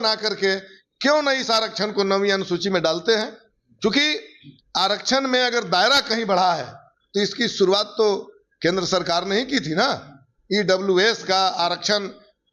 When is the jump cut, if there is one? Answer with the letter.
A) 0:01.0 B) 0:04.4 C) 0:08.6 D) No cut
D